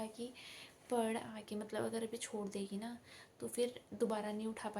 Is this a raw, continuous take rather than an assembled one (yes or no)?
yes